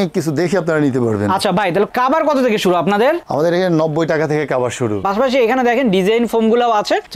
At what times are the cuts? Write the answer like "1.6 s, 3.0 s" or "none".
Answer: none